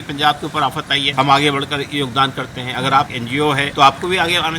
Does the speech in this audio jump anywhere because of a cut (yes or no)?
yes